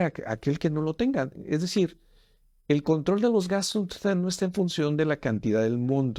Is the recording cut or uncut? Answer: uncut